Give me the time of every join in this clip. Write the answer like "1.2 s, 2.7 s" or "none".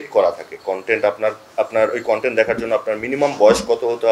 none